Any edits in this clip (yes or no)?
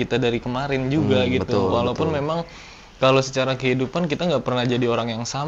no